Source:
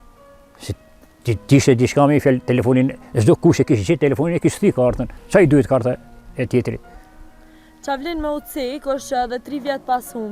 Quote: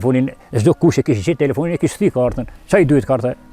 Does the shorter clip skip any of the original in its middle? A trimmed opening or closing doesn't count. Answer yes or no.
no